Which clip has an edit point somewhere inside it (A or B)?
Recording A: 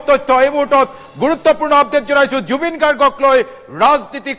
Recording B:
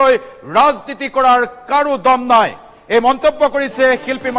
A